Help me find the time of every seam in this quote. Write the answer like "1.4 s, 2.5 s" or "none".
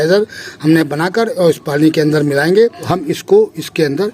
2.9 s